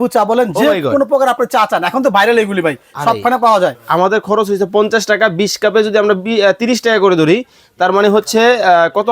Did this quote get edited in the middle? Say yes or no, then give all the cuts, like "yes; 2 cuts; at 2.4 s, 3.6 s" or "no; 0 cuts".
yes; 1 cut; at 3.8 s